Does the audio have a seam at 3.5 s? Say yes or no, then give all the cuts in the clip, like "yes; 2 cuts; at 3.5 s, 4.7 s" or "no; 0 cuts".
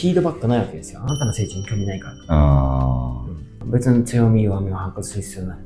no; 0 cuts